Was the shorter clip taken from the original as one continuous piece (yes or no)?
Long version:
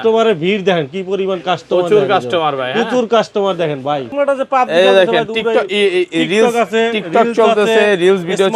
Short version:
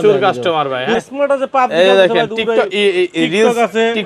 no